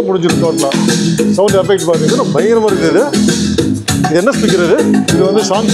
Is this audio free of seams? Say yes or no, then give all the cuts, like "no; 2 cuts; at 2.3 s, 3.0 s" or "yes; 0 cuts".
yes; 0 cuts